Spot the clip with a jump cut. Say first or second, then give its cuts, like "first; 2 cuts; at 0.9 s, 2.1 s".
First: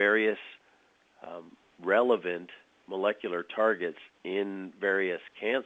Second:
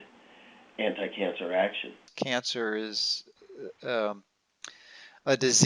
second; 1 cut; at 2.1 s